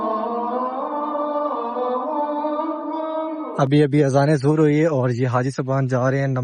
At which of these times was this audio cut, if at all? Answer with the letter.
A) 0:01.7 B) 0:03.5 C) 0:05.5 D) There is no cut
B